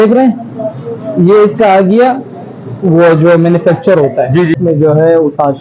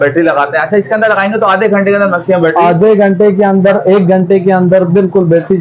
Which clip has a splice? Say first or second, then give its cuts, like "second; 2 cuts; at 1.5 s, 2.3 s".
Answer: first; 1 cut; at 4.6 s